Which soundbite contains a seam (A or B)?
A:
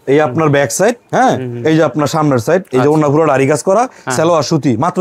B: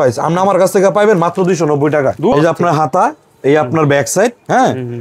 B